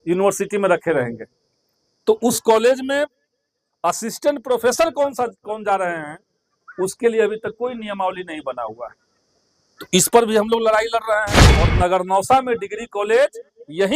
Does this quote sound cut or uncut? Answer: cut